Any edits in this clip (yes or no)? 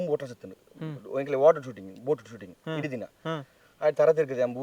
no